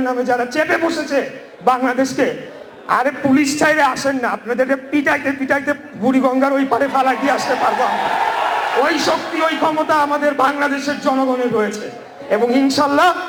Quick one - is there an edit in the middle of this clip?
no; 0 cuts

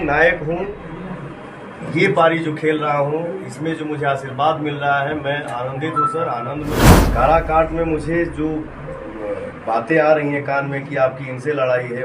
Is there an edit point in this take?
yes; 1 cut; at 6.9 s

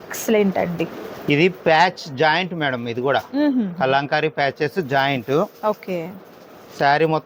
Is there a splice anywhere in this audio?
no; 0 cuts

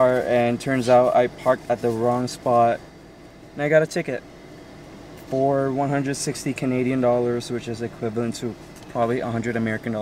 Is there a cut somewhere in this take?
no; 0 cuts

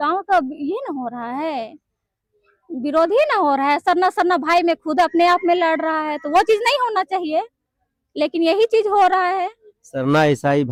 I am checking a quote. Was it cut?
no; 0 cuts

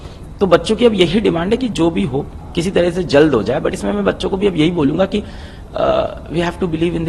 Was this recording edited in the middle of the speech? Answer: no; 0 cuts

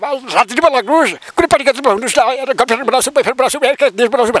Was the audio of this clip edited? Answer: no; 0 cuts

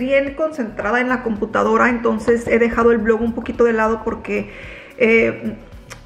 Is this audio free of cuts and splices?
yes; 0 cuts

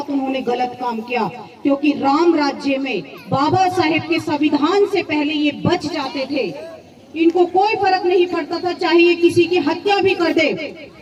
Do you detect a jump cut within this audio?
no; 0 cuts

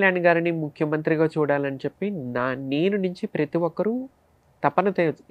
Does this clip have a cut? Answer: no; 0 cuts

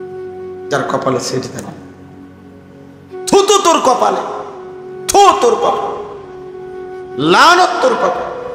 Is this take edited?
no; 0 cuts

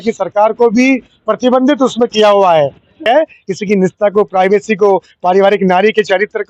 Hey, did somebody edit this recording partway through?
yes; 1 cut; at 3.1 s

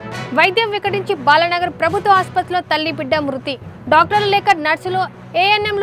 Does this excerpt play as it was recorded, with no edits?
yes; 0 cuts

